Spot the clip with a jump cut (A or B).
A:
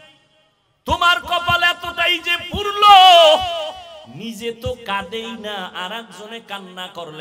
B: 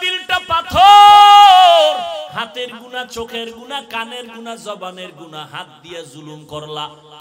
B